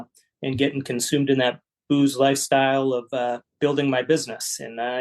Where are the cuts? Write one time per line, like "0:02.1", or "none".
0:03.4